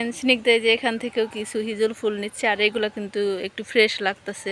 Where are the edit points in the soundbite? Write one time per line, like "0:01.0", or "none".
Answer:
none